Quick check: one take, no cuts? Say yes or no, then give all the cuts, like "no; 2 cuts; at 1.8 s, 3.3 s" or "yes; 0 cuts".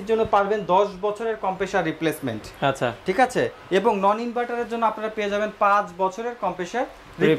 yes; 0 cuts